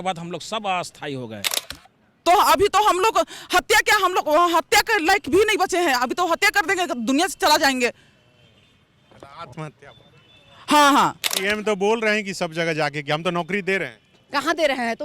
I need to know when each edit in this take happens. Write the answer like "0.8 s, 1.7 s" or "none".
1.5 s, 11.3 s